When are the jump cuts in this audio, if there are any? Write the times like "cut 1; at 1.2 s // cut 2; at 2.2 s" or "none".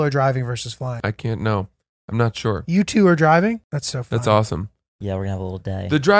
cut 1; at 1.0 s // cut 2; at 3.7 s